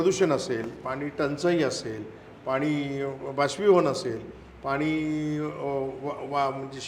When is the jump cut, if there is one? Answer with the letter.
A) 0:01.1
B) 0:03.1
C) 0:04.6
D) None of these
D